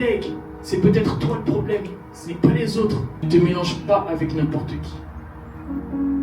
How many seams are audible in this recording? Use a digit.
1